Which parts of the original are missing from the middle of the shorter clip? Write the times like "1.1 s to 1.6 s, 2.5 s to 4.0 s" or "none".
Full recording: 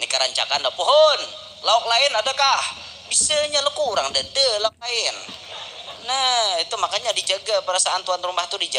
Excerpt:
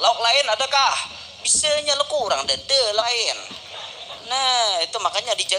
4.7 s to 4.8 s